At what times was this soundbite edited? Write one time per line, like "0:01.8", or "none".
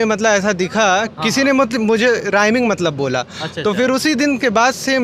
none